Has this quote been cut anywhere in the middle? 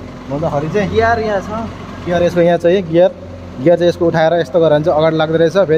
no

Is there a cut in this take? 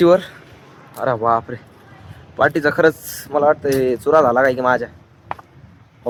no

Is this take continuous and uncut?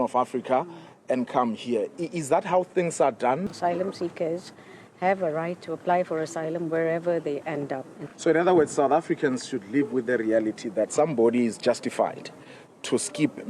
no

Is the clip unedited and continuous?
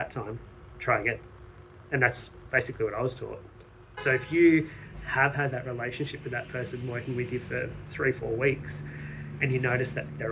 no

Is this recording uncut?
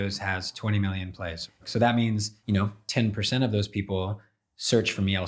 no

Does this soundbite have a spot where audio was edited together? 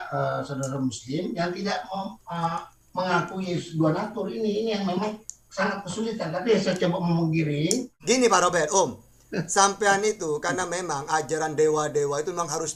yes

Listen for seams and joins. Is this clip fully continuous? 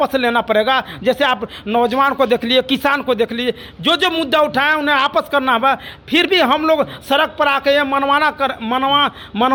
yes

